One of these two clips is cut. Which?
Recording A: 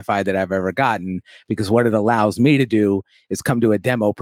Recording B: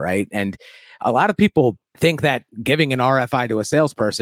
B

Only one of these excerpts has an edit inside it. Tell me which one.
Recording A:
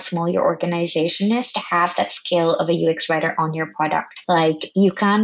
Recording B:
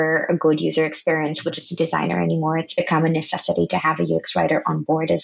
A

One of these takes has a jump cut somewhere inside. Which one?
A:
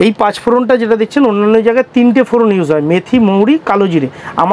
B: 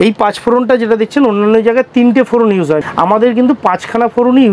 B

